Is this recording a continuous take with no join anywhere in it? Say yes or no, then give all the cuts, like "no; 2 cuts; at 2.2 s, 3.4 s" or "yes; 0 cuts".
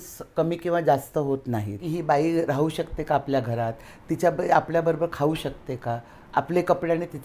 no; 1 cut; at 1.8 s